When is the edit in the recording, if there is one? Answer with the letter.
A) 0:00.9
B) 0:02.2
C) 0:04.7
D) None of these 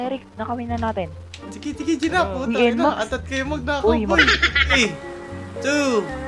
C